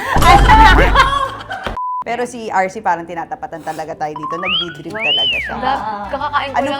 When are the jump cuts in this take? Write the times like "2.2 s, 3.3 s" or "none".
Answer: 2.0 s